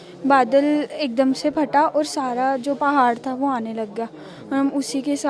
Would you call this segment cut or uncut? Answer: uncut